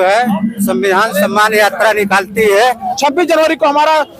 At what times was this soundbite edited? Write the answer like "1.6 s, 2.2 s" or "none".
2.9 s